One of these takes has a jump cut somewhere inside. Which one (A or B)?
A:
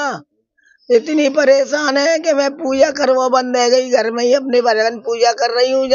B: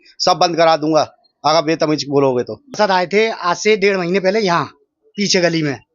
B